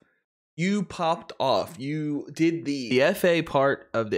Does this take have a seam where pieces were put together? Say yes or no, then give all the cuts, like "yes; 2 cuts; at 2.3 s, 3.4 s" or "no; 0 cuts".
yes; 1 cut; at 2.9 s